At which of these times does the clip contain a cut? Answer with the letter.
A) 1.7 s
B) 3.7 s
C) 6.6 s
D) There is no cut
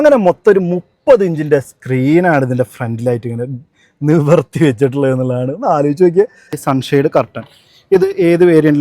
C